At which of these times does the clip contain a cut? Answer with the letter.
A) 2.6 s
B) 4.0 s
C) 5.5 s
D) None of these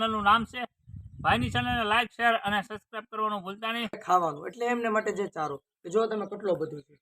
B